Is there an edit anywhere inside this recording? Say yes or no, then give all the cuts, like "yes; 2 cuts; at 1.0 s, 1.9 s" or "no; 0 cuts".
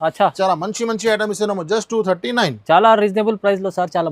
no; 0 cuts